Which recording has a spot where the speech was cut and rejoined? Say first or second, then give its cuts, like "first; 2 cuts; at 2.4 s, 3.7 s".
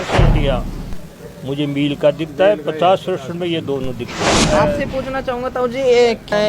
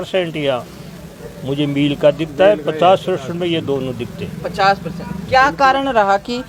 first; 1 cut; at 4.3 s